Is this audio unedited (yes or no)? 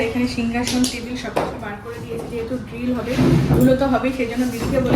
yes